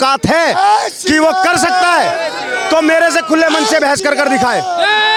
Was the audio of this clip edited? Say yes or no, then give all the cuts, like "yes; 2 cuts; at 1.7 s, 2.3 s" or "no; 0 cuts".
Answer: no; 0 cuts